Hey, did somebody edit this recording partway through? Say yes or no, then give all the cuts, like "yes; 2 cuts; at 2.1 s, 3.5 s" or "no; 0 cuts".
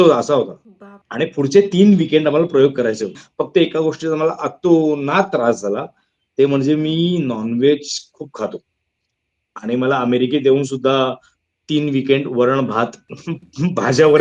yes; 1 cut; at 3.2 s